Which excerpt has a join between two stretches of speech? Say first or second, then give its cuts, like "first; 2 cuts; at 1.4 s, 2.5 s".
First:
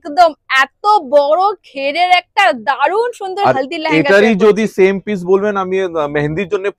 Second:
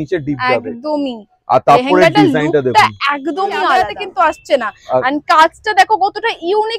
second; 1 cut; at 4.0 s